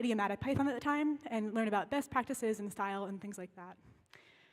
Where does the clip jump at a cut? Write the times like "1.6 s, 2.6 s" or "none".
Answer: none